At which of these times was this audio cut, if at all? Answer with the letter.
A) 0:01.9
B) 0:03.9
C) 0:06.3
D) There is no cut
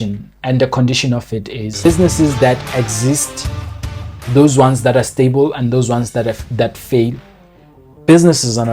A